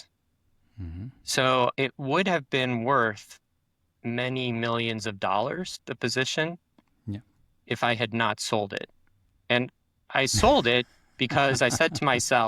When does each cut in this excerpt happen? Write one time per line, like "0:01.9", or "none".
0:01.7
0:05.8